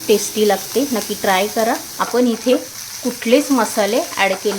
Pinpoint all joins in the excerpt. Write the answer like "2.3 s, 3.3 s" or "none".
1.9 s